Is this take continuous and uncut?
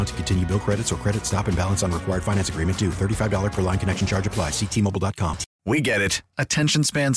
no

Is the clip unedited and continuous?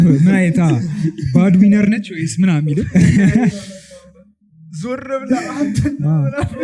yes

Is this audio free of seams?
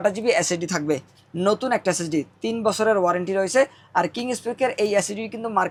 yes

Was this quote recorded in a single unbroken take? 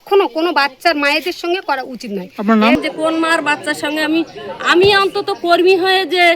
no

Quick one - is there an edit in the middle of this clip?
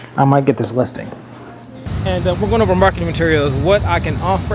yes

